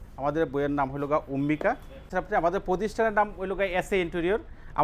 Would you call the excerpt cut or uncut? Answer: cut